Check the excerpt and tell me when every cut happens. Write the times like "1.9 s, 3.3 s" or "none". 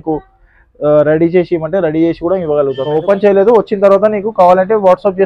2.9 s